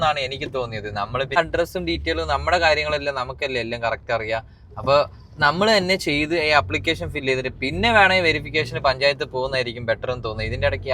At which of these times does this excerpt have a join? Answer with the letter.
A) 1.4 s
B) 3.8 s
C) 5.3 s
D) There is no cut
A